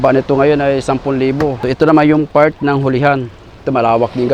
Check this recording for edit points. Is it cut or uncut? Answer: cut